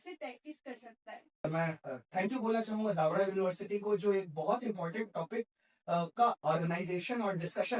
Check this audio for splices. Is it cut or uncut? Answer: cut